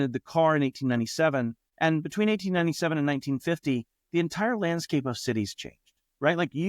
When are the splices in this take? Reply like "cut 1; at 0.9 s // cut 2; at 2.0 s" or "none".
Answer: cut 1; at 1.6 s

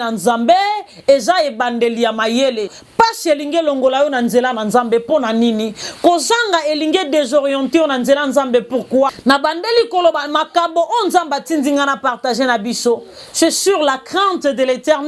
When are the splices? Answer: cut 1; at 2.8 s // cut 2; at 9.2 s

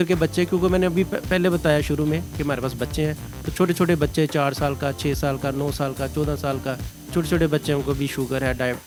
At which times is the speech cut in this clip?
none

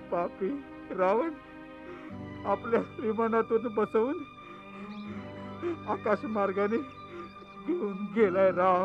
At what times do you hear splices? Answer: none

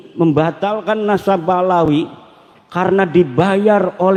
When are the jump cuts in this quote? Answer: none

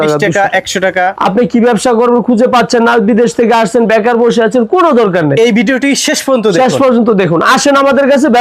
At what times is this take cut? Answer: cut 1; at 1.1 s

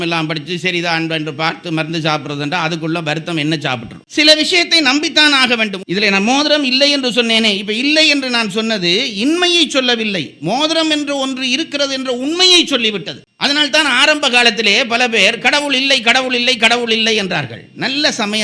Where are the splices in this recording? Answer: cut 1; at 5.8 s

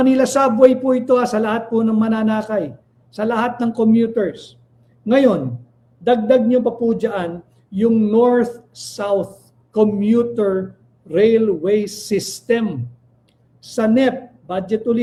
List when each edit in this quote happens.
none

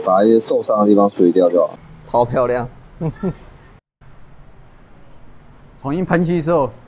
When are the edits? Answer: cut 1; at 1.9 s // cut 2; at 4.0 s

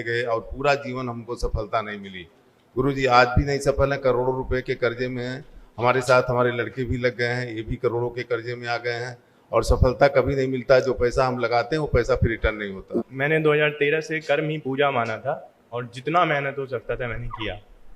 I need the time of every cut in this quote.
cut 1; at 12.9 s

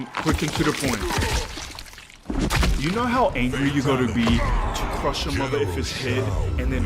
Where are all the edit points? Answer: none

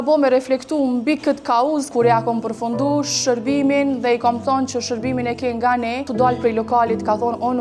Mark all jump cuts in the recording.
cut 1; at 1.9 s // cut 2; at 6.1 s

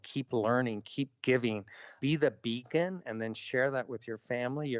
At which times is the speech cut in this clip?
cut 1; at 2.0 s

